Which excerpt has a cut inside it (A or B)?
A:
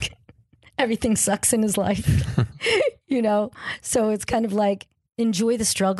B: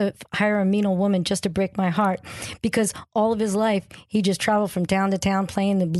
A